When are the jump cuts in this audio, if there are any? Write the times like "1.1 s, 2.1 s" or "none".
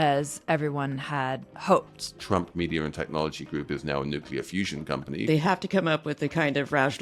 1.5 s, 2.2 s, 5.2 s